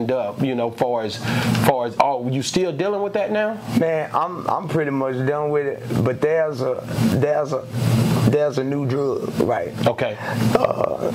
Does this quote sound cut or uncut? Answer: uncut